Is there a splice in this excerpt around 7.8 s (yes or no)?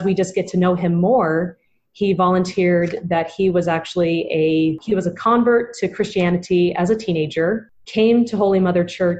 yes